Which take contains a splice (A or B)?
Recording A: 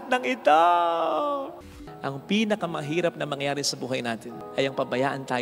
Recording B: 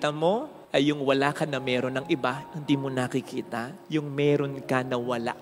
A